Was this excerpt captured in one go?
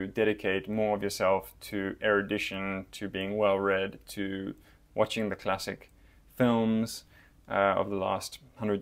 yes; 0 cuts

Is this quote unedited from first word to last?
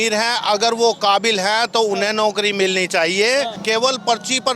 no; 1 cut; at 3.6 s

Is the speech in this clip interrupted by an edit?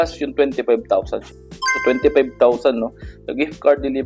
yes; 1 cut; at 1.2 s

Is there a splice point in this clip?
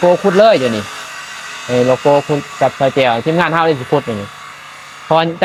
no; 0 cuts

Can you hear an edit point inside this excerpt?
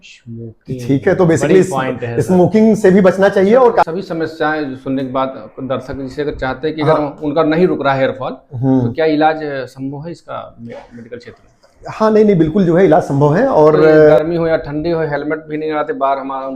yes; 2 cuts; at 3.8 s, 14.2 s

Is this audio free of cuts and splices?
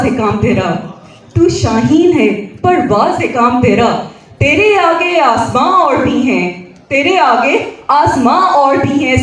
yes; 0 cuts

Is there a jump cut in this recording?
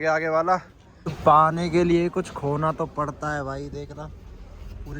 yes; 1 cut; at 1.0 s

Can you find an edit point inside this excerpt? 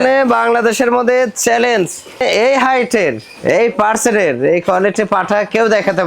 yes; 1 cut; at 2.2 s

